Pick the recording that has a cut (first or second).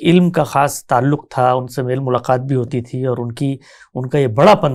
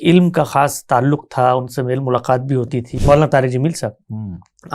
second